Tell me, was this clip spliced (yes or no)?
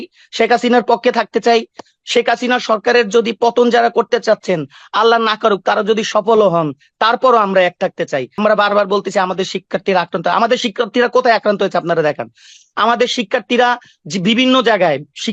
yes